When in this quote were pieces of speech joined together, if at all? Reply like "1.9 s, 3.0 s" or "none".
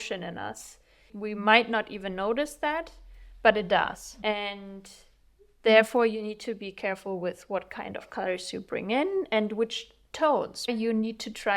1.1 s, 10.7 s